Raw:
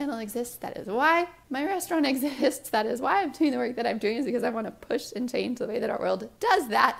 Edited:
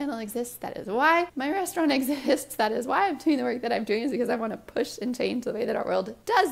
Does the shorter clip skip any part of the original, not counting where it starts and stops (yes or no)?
yes